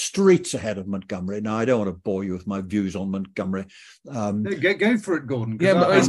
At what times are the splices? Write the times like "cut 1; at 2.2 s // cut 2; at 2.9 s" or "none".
none